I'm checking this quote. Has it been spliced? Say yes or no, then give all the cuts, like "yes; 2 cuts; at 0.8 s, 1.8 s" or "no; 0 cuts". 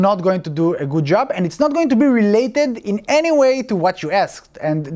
no; 0 cuts